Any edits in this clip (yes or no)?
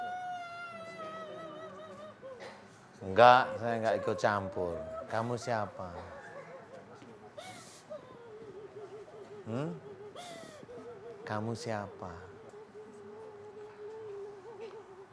yes